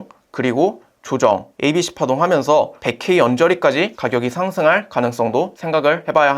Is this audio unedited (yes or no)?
no